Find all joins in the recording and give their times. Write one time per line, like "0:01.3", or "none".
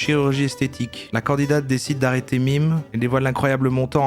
0:01.0
0:02.9